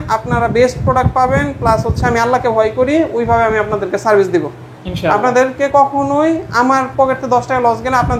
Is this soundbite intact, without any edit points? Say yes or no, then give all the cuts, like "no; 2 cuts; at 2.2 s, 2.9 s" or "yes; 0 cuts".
yes; 0 cuts